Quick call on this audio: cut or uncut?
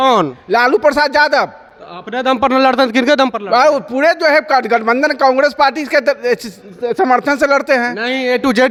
uncut